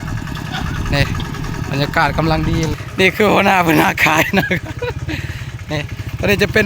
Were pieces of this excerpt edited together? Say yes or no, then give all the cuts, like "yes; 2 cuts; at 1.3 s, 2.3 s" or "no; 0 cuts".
yes; 1 cut; at 2.7 s